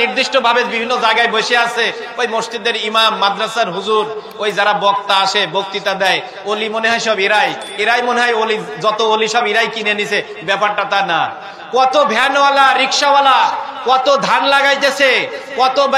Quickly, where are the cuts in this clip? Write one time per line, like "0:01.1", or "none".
none